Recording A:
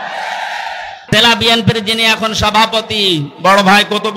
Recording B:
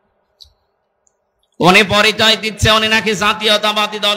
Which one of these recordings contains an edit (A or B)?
A